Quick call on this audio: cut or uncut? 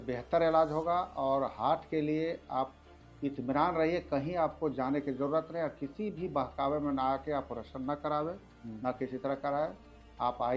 uncut